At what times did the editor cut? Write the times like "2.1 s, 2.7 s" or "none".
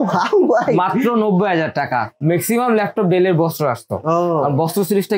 2.1 s